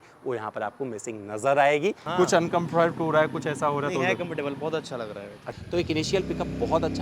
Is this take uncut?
no; 2 cuts; at 2.0 s, 5.5 s

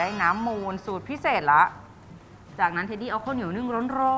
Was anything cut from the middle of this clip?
no; 0 cuts

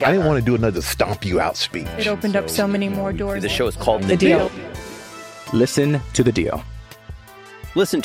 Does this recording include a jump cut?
no; 0 cuts

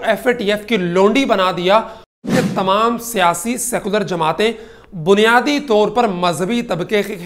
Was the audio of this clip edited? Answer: yes; 1 cut; at 2.3 s

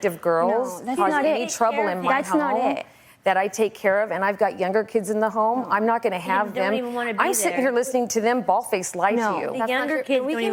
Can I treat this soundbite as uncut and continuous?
yes; 0 cuts

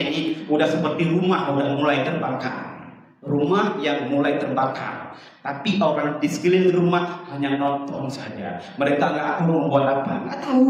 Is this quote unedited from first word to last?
yes; 0 cuts

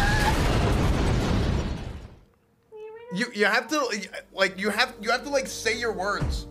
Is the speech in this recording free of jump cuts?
yes; 0 cuts

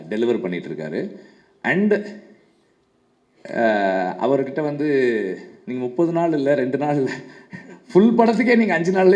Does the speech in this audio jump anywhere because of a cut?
no; 0 cuts

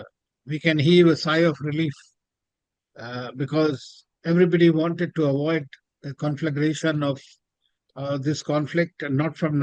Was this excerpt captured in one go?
yes; 0 cuts

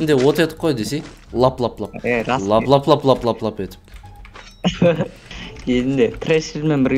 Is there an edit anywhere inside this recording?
no; 0 cuts

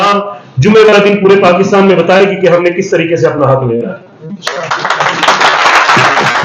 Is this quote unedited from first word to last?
yes; 0 cuts

